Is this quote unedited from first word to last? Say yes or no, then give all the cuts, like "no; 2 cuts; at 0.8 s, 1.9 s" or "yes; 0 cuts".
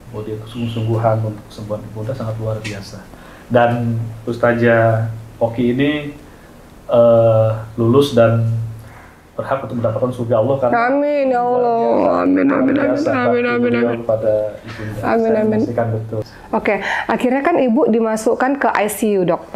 no; 1 cut; at 16.1 s